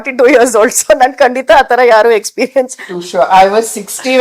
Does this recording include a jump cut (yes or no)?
yes